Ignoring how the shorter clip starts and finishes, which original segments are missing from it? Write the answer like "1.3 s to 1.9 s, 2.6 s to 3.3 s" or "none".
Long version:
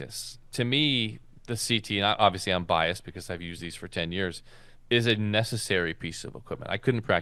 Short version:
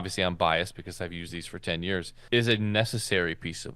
4.4 s to 4.7 s

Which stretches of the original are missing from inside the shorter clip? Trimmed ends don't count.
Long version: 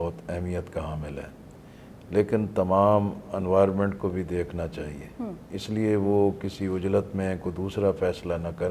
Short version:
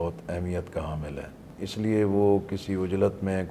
1.5 s to 5.4 s

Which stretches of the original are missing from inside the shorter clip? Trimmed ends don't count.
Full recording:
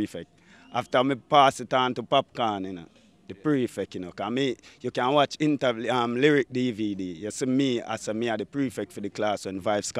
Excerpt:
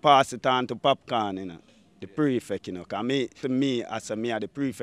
4.6 s to 7.3 s

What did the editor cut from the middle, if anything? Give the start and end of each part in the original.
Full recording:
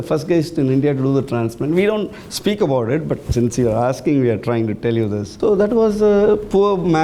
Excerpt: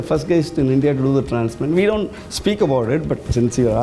none

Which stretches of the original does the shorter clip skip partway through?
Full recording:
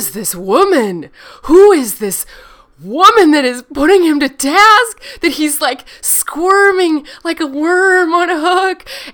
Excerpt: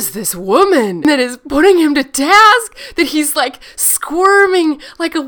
1.0 s to 3.3 s

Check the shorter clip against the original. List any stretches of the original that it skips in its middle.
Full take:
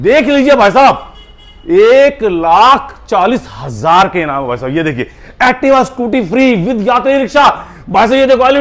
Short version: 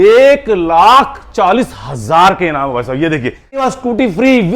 5.4 s to 5.8 s

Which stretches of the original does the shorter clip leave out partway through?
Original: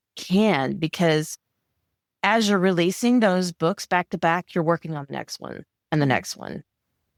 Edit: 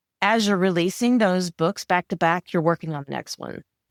none

